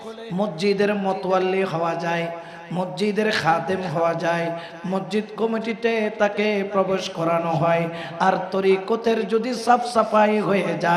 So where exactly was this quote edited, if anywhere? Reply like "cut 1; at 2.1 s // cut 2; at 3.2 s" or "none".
none